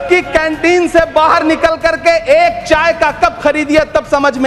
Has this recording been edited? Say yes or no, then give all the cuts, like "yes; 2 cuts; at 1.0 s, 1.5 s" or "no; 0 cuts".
no; 0 cuts